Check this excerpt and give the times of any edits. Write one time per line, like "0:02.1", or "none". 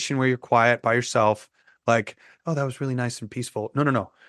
none